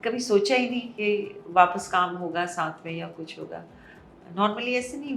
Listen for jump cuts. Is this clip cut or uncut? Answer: uncut